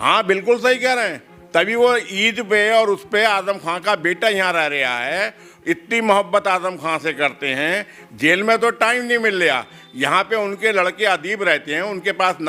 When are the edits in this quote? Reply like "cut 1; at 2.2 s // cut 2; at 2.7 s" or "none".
none